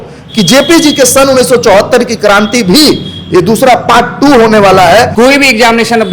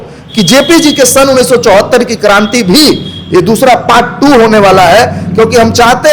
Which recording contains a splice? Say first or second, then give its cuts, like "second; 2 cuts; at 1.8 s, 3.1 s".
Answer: first; 1 cut; at 5.1 s